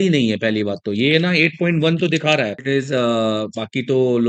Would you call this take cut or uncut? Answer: cut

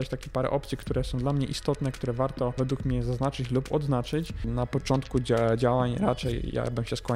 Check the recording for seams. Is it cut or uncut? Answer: cut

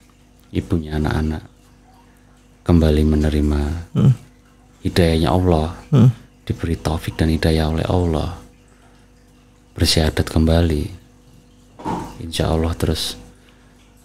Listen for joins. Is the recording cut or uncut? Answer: uncut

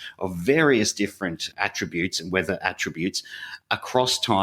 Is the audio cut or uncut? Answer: uncut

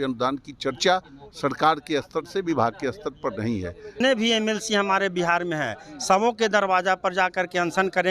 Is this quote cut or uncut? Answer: cut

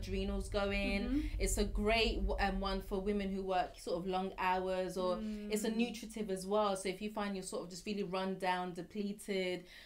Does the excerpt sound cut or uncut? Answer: uncut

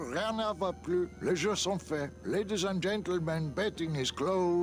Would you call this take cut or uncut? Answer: uncut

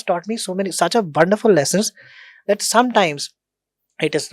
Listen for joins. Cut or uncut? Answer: uncut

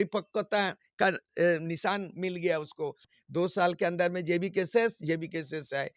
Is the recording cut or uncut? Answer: cut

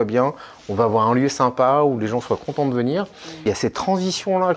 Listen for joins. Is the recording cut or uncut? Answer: cut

